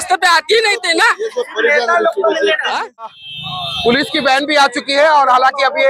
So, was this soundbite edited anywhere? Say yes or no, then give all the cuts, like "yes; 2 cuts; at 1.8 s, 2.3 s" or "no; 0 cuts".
yes; 1 cut; at 3.1 s